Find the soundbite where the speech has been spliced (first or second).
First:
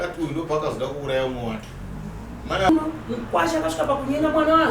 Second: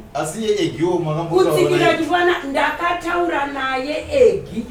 first